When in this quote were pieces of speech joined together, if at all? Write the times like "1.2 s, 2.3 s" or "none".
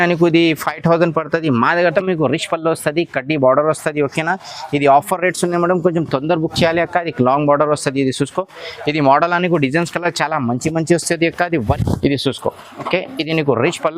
1.9 s, 11.8 s